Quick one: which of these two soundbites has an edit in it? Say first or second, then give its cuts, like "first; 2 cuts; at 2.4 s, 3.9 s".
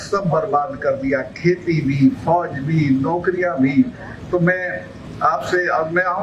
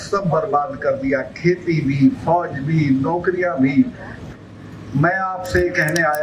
second; 1 cut; at 4.2 s